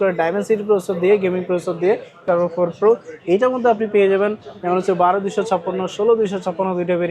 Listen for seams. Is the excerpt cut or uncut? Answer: cut